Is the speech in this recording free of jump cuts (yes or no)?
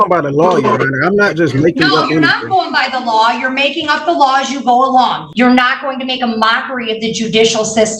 no